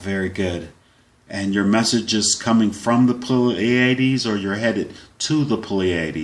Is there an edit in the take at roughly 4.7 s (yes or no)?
yes